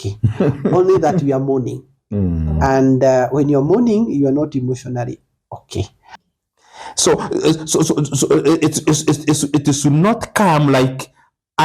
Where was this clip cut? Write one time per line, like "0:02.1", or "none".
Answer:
0:06.0